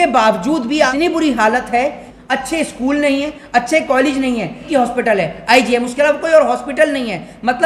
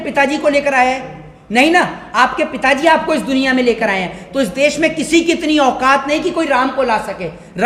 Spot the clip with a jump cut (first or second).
first